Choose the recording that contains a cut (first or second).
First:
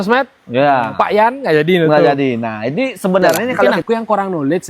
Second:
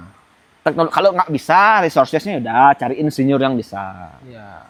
first